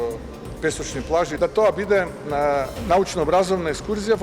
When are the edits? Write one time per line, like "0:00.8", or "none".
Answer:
0:01.3